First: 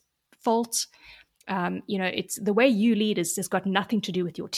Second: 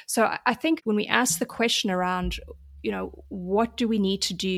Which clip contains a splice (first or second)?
second